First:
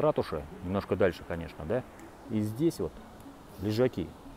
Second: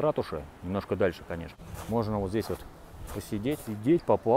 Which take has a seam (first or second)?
second